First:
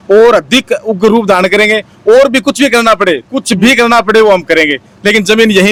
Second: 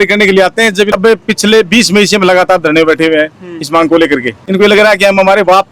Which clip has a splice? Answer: second; 2 cuts; at 0.9 s, 4.4 s

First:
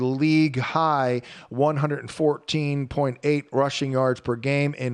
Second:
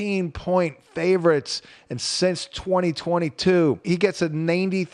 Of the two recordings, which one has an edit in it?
second; 1 cut; at 3.8 s

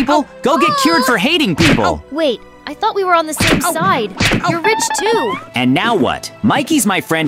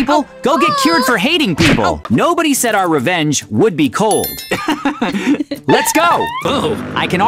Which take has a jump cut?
second; 2 cuts; at 2.1 s, 6.5 s

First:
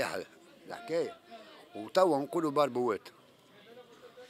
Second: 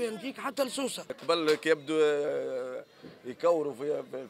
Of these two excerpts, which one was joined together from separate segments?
second; 1 cut; at 1.2 s

